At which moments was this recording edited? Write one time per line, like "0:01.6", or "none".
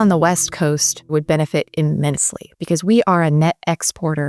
0:01.1